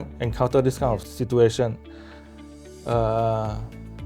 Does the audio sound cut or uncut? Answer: uncut